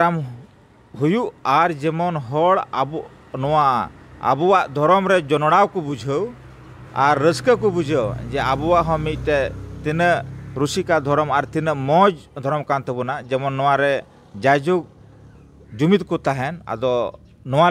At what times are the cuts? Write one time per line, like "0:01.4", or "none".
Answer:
none